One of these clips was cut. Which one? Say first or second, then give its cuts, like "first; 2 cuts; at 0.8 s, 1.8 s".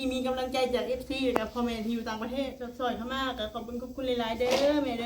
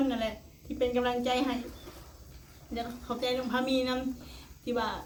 first; 1 cut; at 2.6 s